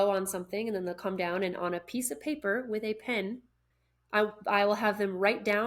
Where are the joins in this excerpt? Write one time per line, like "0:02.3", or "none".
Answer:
0:03.6